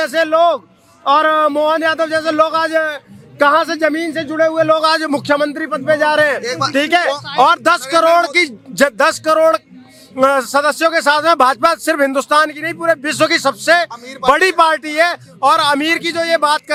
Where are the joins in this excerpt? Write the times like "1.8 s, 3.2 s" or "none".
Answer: none